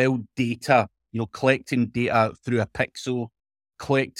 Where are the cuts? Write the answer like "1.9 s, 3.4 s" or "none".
none